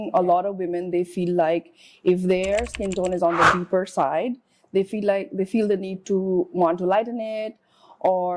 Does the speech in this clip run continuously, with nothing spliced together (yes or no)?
yes